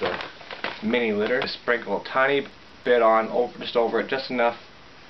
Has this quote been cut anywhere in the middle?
yes; 1 cut; at 1.5 s

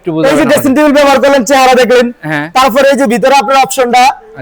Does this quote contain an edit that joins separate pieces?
no; 0 cuts

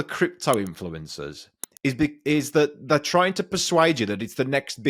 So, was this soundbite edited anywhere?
no; 0 cuts

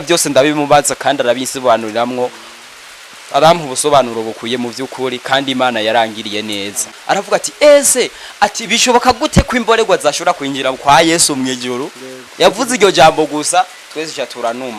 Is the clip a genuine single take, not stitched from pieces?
no; 1 cut; at 6.9 s

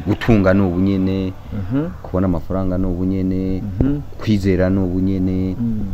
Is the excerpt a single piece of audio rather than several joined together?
yes; 0 cuts

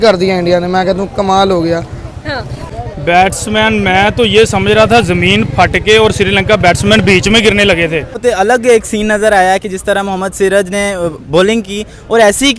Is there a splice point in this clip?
yes; 2 cuts; at 2.7 s, 8.2 s

